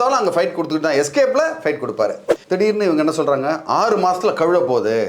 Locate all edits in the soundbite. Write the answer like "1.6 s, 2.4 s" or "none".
2.3 s